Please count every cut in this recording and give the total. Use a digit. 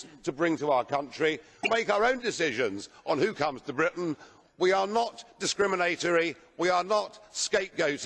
1